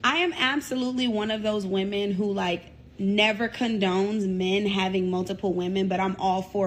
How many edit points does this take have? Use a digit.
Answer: 0